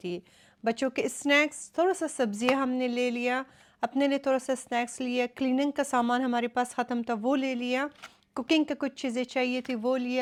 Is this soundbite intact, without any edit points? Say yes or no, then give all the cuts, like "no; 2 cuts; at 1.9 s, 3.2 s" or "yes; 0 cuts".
yes; 0 cuts